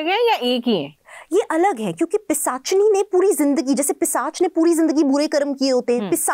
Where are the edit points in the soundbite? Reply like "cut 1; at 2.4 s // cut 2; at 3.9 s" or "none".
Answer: none